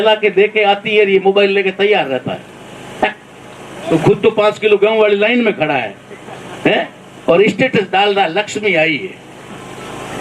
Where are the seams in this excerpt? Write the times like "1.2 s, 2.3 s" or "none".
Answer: 3.9 s